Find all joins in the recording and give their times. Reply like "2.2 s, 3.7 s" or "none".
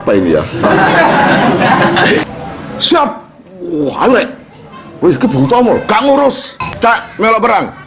2.3 s, 6.6 s

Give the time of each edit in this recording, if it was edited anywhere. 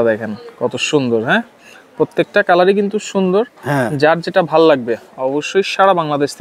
none

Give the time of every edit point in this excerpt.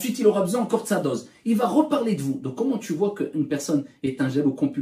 none

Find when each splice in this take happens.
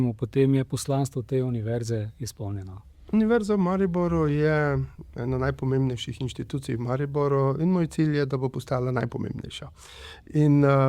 3.0 s

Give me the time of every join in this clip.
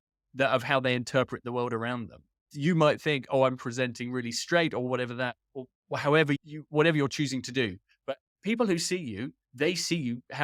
none

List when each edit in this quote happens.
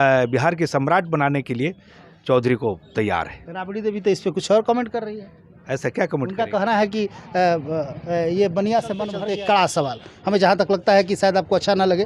9.0 s

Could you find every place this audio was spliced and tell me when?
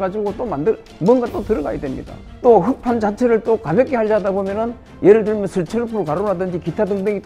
4.8 s

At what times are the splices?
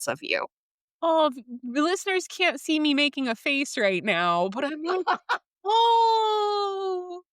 none

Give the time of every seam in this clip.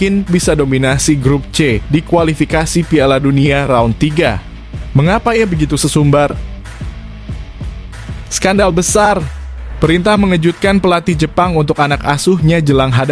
6.5 s, 8.3 s

